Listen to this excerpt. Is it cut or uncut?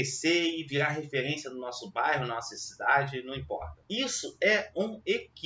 cut